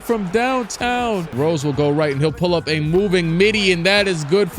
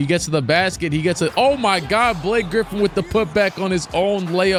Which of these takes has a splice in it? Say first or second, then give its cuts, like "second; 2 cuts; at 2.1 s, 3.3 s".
first; 1 cut; at 1.3 s